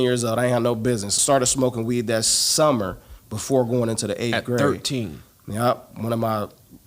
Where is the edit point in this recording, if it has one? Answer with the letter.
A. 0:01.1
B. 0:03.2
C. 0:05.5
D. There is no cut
A